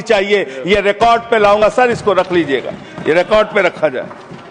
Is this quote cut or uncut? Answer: uncut